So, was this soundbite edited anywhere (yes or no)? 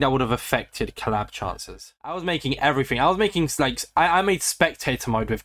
yes